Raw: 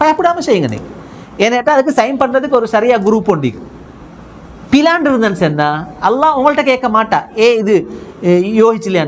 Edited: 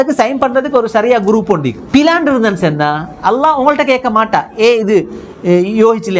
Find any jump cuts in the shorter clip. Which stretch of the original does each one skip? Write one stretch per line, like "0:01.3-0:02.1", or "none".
0:03.6-0:04.6